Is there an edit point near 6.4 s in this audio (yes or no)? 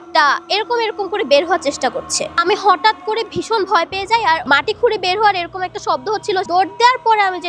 yes